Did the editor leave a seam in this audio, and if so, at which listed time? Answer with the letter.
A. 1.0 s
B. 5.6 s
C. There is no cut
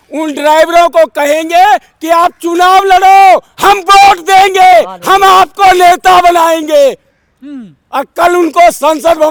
C